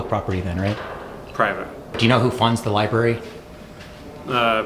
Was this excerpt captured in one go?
no; 1 cut; at 2.0 s

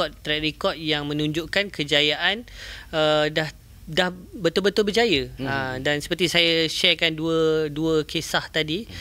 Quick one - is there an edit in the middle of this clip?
no; 0 cuts

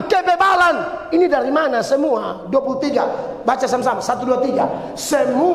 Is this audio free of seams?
yes; 0 cuts

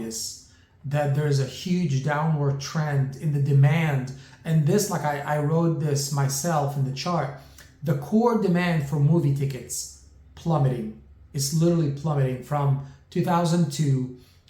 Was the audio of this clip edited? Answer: no; 0 cuts

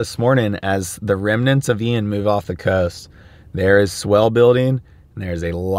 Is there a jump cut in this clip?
no; 0 cuts

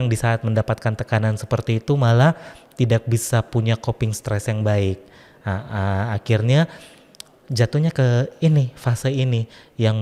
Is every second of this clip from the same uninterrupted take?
yes; 0 cuts

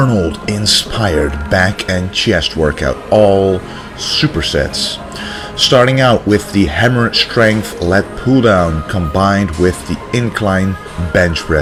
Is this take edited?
no; 0 cuts

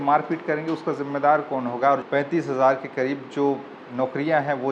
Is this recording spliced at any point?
yes; 1 cut; at 2.0 s

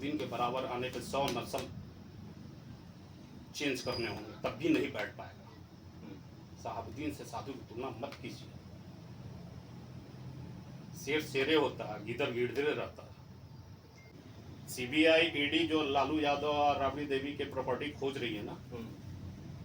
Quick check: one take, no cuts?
no; 1 cut; at 14.1 s

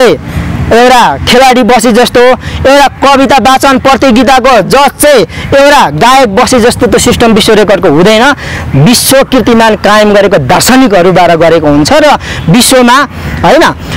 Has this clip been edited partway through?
no; 0 cuts

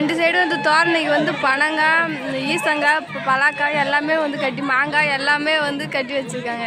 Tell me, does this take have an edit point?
no; 0 cuts

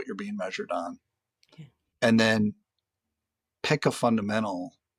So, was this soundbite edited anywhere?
no; 0 cuts

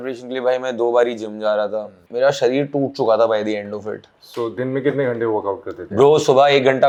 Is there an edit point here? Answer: no; 0 cuts

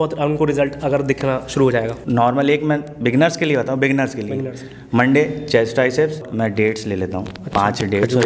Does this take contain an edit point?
yes; 2 cuts; at 2.0 s, 6.3 s

